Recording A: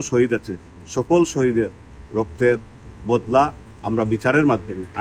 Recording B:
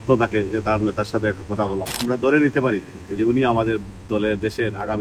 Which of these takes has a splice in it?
B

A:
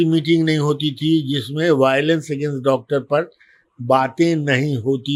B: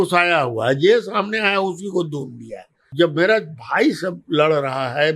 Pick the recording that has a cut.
B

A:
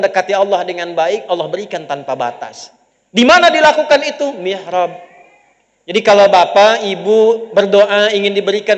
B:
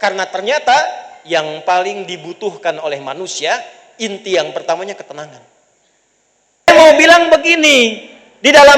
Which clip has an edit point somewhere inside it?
B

